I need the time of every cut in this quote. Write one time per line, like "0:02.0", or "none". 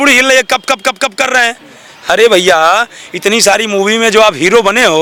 none